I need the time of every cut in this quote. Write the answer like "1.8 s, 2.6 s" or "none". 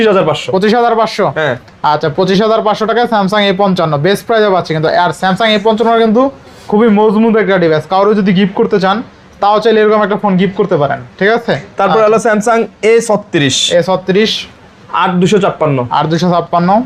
none